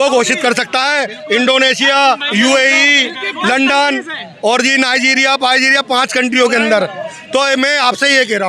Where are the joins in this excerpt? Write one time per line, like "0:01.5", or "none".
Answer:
none